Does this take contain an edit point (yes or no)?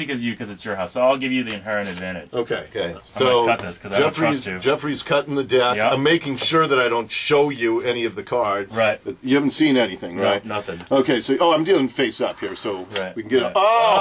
yes